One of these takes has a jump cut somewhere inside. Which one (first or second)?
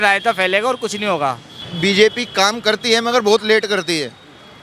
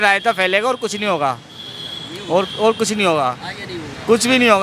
first